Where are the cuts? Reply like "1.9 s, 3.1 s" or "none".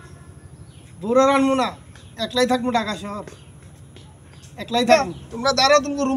4.9 s